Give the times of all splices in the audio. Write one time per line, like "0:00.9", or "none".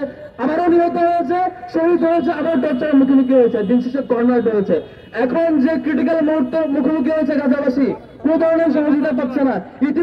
none